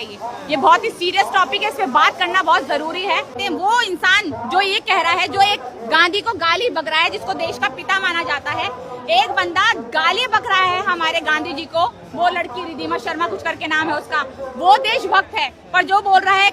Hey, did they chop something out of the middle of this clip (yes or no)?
yes